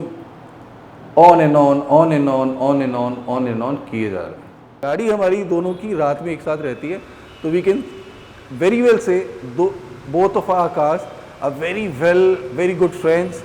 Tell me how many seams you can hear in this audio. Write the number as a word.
one